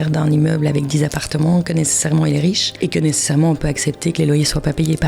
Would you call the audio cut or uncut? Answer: cut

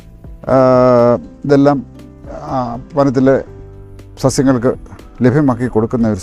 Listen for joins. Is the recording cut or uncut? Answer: uncut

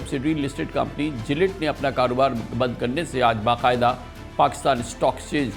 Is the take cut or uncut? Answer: uncut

